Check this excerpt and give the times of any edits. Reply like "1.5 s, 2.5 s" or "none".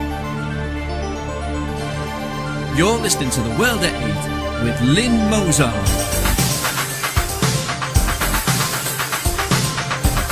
none